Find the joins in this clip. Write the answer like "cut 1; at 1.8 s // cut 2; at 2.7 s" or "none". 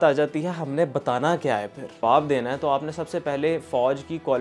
cut 1; at 2.0 s